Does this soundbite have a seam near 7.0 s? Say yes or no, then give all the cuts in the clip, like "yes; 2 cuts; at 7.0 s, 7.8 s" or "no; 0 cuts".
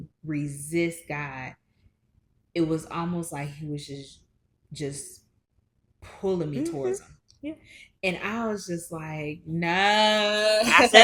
no; 0 cuts